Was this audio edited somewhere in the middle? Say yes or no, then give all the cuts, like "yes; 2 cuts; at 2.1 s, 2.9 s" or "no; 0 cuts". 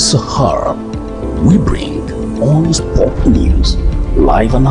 no; 0 cuts